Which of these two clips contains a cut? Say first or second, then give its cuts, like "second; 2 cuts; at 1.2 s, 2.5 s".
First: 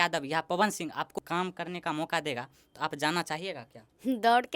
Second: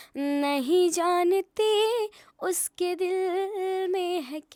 first; 1 cut; at 1.1 s